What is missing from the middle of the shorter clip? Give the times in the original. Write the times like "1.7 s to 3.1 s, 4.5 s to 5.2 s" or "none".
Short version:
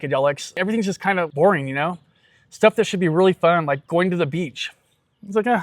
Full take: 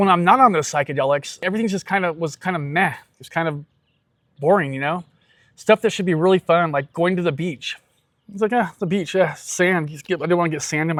2.2 s to 4.4 s